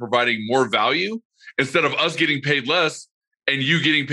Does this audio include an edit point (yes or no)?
no